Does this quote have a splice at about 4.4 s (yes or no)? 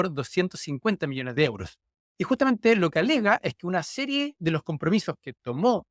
no